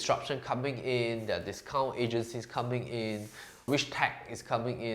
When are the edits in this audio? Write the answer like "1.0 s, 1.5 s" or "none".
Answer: none

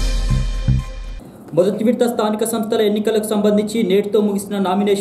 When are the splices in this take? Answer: none

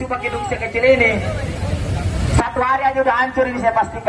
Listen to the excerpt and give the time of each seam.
none

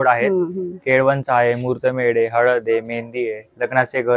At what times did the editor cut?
none

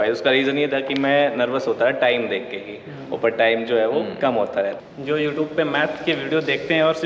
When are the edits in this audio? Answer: 4.8 s

